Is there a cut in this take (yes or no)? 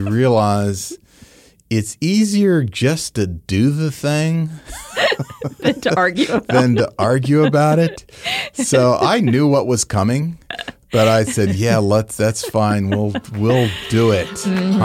no